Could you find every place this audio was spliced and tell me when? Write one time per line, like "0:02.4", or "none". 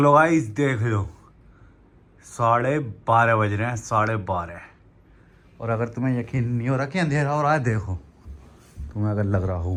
none